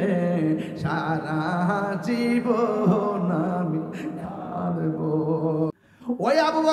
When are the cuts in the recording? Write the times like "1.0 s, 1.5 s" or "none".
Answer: 5.7 s

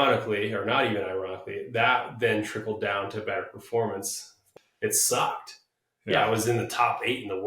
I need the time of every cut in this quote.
4.5 s

